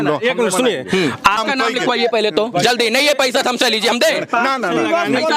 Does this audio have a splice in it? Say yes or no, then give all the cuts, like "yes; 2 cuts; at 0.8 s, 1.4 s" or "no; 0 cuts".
yes; 1 cut; at 1.4 s